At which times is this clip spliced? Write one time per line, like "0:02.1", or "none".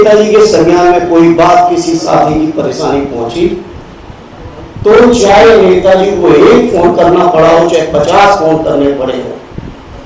none